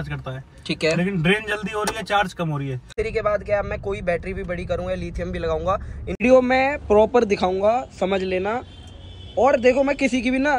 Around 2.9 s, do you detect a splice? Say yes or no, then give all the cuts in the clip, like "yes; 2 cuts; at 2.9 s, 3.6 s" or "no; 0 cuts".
yes; 2 cuts; at 2.9 s, 6.2 s